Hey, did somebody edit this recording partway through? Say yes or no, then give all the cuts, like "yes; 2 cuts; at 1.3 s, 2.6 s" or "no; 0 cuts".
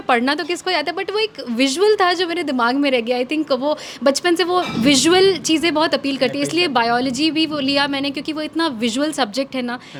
no; 0 cuts